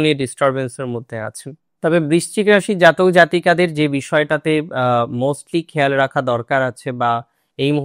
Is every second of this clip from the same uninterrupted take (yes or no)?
no